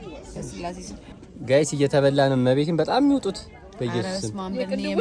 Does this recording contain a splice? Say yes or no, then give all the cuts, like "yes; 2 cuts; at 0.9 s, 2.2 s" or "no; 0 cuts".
yes; 1 cut; at 1.0 s